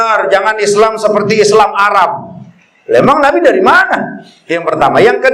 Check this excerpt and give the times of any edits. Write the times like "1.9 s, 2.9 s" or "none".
none